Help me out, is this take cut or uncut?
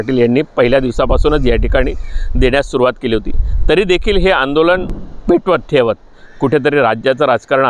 cut